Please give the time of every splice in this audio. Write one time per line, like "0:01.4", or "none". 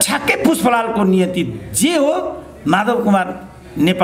none